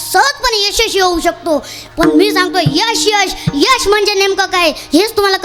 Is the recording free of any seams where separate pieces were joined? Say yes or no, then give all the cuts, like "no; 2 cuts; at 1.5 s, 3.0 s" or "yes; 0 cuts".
yes; 0 cuts